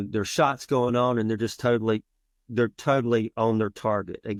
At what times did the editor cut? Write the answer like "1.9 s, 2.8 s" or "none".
none

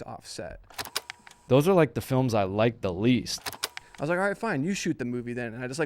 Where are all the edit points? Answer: 1.1 s, 3.5 s

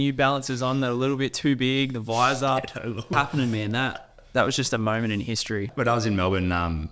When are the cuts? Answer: 3.1 s, 5.7 s

